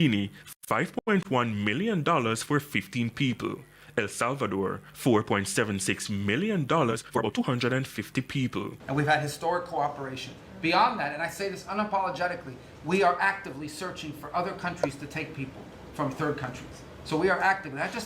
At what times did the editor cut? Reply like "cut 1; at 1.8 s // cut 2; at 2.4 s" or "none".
cut 1; at 8.8 s